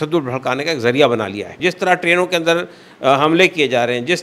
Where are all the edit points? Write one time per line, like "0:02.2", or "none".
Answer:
0:01.5